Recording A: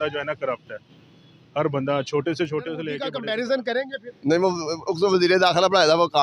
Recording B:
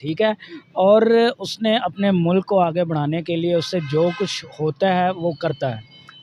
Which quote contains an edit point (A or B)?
A